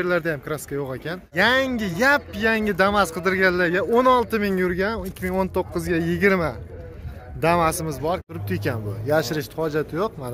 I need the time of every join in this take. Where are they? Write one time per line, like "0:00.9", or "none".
0:01.3
0:08.3